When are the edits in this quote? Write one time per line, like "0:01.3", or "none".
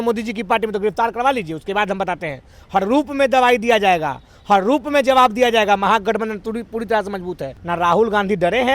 0:07.5